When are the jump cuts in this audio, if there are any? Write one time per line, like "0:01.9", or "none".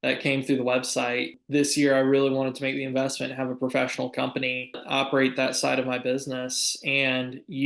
0:01.4
0:04.8